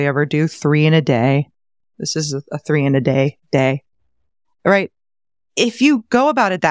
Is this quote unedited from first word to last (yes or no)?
yes